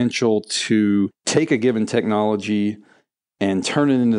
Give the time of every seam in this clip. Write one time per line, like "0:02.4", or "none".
0:01.2